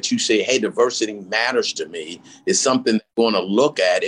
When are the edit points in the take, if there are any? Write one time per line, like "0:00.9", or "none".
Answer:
0:03.1